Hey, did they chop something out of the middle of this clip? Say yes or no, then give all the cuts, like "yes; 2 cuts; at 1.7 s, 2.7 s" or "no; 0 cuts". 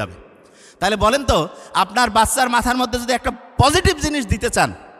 no; 0 cuts